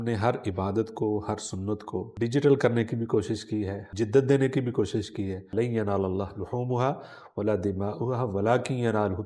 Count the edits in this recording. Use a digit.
3